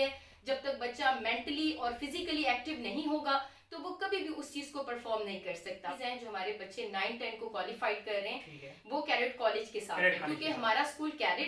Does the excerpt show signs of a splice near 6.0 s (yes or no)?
yes